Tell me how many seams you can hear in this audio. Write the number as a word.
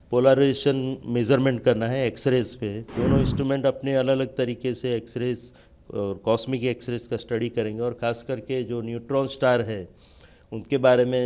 one